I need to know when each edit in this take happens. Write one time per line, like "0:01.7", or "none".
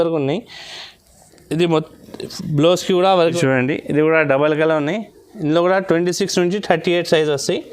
0:03.2